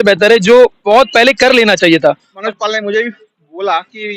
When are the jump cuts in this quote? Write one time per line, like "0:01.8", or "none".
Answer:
0:02.4